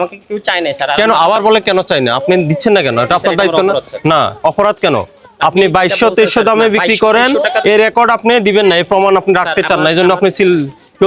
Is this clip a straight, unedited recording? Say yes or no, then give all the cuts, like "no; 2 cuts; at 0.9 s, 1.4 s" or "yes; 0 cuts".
yes; 0 cuts